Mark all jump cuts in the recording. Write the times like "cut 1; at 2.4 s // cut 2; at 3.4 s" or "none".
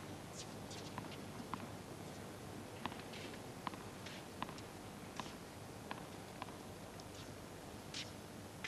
cut 1; at 6.2 s